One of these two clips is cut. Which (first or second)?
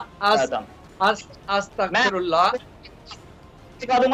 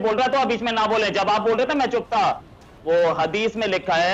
second